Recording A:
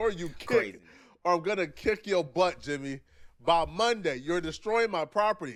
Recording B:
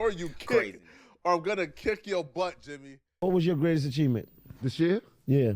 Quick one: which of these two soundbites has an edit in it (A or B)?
B